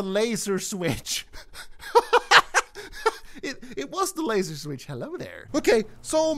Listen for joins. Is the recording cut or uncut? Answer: cut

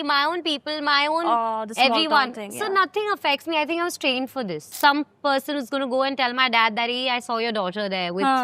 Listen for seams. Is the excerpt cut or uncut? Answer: cut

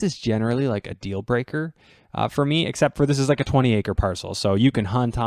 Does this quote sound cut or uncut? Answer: uncut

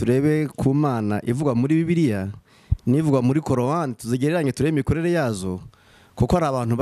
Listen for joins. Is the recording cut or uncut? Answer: uncut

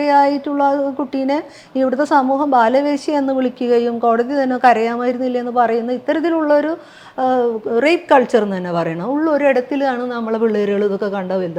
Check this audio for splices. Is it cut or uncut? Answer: uncut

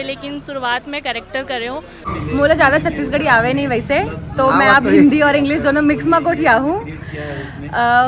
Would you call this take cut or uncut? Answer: cut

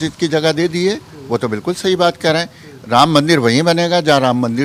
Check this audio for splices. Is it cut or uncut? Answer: uncut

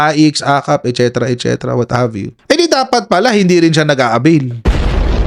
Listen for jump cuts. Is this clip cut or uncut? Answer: cut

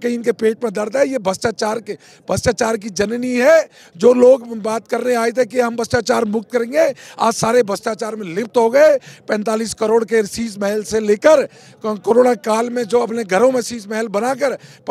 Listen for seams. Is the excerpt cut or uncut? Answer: uncut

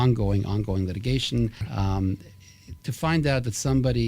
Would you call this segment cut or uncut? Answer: cut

